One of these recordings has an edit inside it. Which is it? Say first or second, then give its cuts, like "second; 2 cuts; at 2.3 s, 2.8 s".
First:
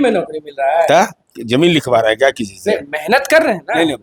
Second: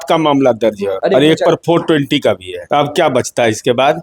second; 2 cuts; at 0.9 s, 2.5 s